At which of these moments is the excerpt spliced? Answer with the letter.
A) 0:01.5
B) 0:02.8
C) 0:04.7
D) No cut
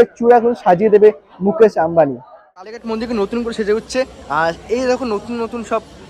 B